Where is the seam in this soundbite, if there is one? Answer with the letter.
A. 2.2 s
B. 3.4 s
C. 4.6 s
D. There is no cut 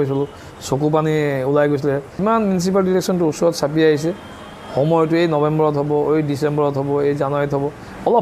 A